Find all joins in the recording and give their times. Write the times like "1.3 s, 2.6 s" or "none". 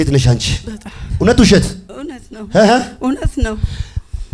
none